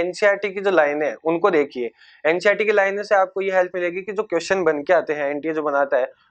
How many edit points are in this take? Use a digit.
0